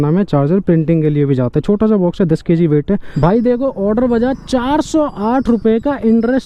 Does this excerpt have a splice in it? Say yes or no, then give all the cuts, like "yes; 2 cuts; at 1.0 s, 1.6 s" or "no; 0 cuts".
yes; 1 cut; at 3.1 s